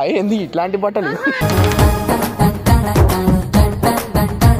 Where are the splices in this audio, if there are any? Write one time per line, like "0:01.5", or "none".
none